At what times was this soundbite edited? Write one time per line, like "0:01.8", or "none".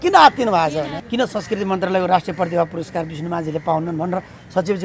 0:01.0